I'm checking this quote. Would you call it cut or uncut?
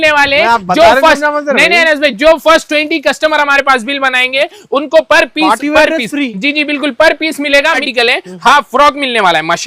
cut